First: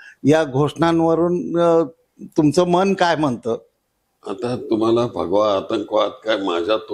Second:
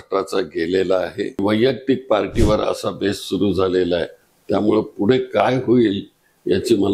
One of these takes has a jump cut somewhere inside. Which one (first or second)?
second